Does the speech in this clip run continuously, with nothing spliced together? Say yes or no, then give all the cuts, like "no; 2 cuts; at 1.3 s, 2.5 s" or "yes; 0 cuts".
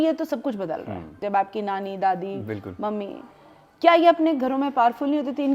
no; 1 cut; at 1.2 s